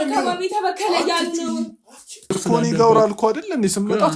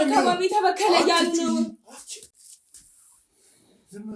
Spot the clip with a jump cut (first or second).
first